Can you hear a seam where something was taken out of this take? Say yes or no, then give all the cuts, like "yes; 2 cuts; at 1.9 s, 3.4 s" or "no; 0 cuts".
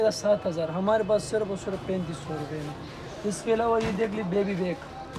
no; 0 cuts